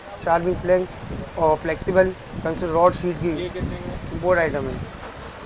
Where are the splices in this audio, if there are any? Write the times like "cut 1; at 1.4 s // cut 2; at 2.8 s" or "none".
none

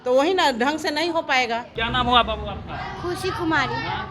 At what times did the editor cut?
cut 1; at 1.7 s

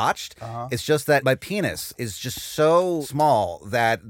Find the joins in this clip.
cut 1; at 1.2 s // cut 2; at 3.1 s

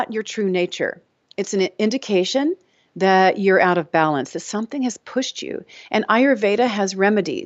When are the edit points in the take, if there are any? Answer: none

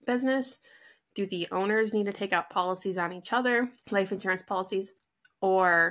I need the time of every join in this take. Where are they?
cut 1; at 3.8 s

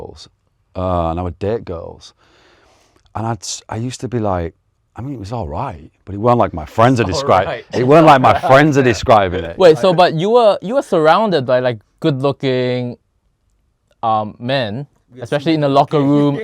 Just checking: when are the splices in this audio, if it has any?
none

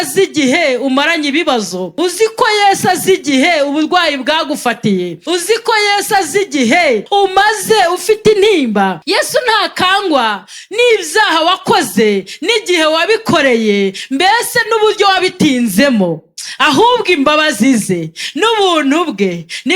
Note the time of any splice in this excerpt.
cut 1; at 1.8 s // cut 2; at 5.2 s // cut 3; at 7.0 s // cut 4; at 9.0 s

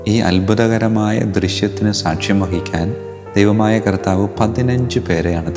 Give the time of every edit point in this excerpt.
none

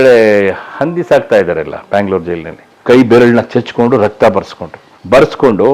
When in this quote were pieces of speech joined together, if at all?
cut 1; at 2.7 s

